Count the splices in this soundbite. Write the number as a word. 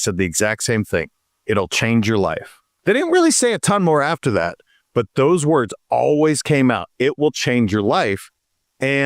one